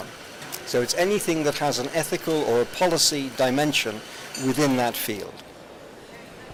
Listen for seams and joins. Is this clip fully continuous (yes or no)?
yes